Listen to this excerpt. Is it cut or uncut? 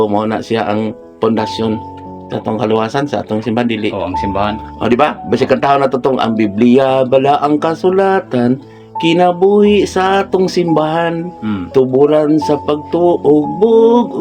uncut